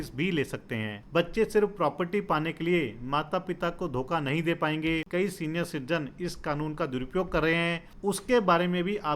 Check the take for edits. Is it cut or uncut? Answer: cut